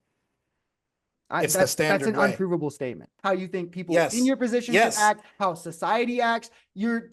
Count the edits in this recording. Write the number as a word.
one